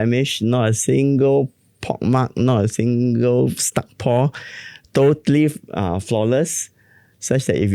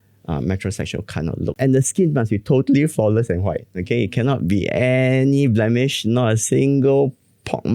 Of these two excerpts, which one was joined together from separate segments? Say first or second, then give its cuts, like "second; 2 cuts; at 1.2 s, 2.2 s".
second; 1 cut; at 1.5 s